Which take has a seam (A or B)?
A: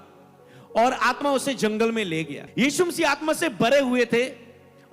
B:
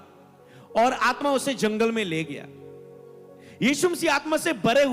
A